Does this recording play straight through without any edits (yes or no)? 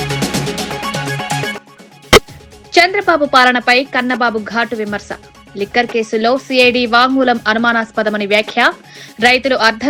yes